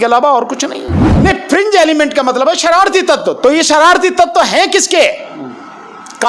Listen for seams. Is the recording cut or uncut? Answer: cut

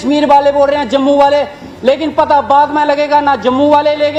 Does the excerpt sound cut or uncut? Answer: uncut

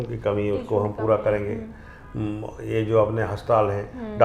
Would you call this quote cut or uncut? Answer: uncut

